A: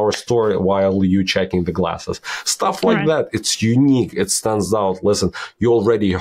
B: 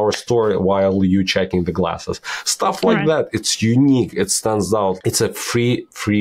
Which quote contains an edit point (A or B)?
B